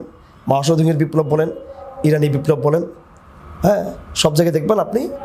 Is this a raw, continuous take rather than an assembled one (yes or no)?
yes